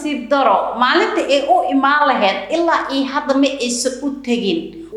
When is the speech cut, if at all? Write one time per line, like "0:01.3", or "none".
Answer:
none